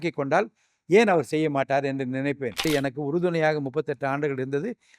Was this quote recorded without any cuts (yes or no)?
no